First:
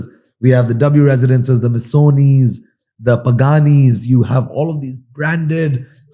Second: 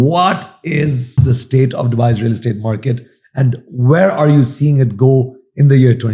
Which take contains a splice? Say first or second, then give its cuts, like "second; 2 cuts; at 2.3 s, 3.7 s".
second; 1 cut; at 1.2 s